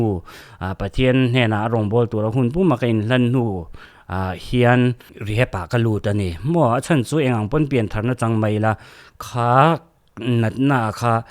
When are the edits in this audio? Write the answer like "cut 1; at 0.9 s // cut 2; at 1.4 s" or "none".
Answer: cut 1; at 5.1 s